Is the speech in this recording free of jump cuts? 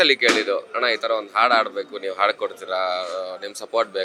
yes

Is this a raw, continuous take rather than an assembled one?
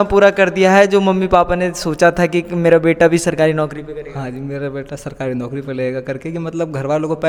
yes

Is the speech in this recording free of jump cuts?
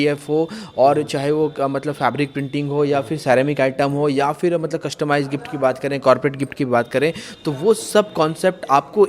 yes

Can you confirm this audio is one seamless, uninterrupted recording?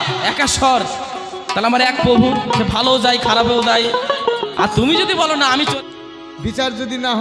no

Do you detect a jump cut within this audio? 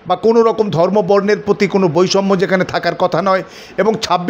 no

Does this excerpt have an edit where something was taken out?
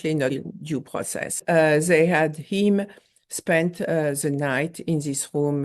yes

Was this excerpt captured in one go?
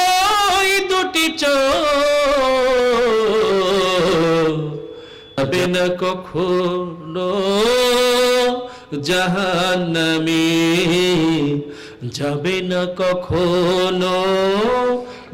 no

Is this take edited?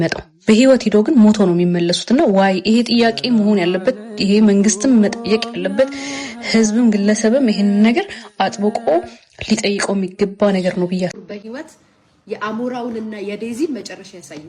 yes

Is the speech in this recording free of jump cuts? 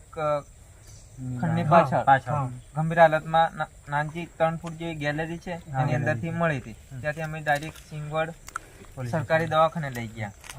yes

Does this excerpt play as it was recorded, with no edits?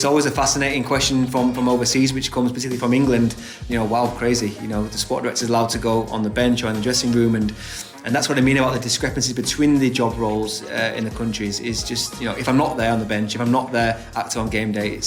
yes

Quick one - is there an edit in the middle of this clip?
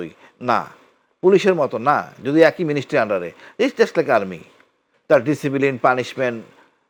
no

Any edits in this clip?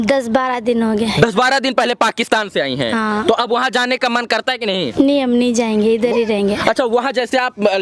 no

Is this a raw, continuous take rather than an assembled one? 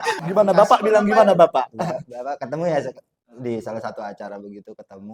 yes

